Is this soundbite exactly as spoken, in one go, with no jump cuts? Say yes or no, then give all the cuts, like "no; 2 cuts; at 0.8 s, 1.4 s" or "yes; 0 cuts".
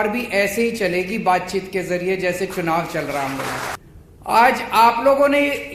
no; 1 cut; at 3.8 s